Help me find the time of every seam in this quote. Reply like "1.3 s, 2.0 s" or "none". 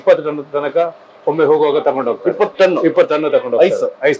none